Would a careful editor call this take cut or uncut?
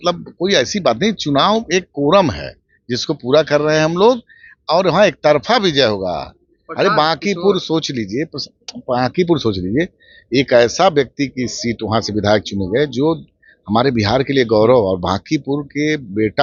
uncut